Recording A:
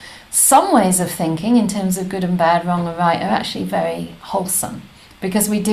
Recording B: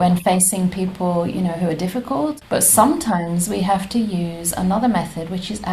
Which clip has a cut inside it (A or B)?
B